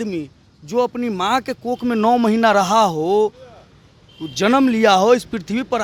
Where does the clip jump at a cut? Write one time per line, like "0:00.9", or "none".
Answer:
none